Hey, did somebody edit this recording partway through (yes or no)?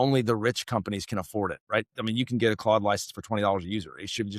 no